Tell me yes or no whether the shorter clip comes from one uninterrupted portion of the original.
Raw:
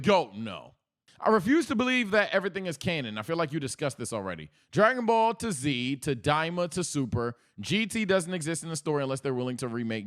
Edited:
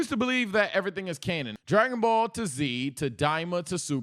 no